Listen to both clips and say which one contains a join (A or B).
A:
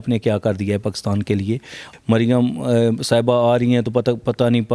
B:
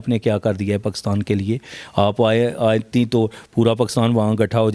A